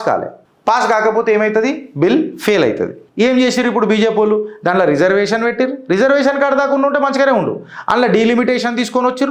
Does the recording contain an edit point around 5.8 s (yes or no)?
no